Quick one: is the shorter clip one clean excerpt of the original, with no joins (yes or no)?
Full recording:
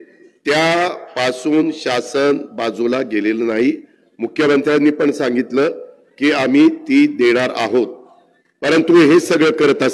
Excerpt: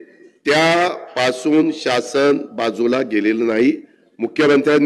yes